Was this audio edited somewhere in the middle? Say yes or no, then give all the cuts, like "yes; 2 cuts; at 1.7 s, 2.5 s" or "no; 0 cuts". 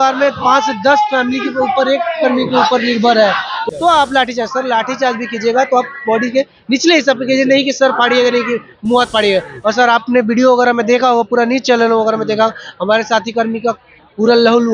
yes; 1 cut; at 3.6 s